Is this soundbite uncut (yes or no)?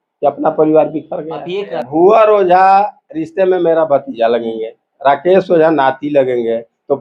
no